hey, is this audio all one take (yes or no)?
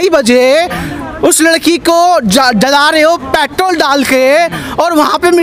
yes